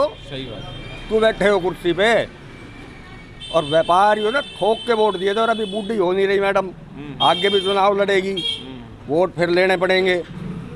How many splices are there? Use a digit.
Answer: 0